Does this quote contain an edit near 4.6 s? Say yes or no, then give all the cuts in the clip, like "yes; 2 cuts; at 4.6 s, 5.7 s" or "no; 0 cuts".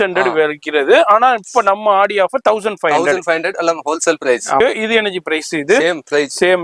yes; 1 cut; at 4.6 s